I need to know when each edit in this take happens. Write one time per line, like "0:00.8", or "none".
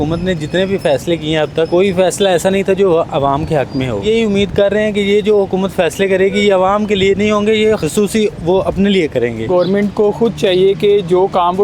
0:01.7
0:04.0
0:07.8
0:09.5